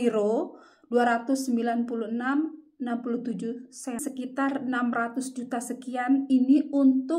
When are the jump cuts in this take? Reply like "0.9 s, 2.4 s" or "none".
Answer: 4.0 s